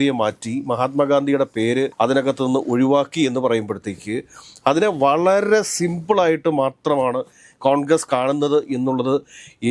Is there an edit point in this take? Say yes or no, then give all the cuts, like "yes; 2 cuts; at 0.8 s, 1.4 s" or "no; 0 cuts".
no; 0 cuts